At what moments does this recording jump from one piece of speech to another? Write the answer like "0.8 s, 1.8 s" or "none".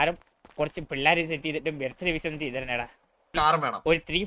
3.3 s